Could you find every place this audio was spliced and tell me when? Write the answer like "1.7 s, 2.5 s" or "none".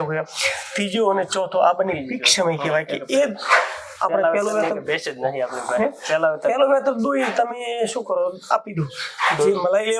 none